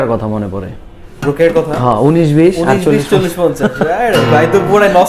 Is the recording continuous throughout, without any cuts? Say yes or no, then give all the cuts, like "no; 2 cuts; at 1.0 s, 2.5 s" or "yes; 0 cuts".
yes; 0 cuts